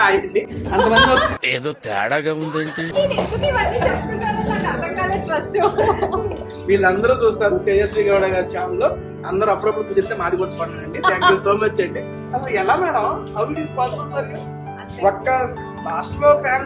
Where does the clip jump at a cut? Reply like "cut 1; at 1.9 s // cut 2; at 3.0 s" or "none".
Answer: none